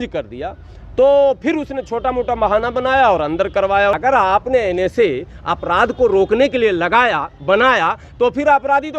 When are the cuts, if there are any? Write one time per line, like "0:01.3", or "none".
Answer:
0:03.9